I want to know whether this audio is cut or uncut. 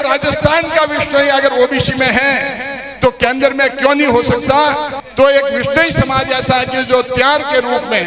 cut